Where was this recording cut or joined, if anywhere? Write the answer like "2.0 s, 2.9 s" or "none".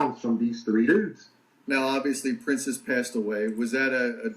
1.5 s